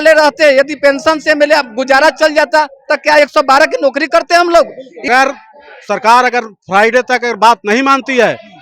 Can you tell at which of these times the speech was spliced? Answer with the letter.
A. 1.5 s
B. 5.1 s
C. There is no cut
B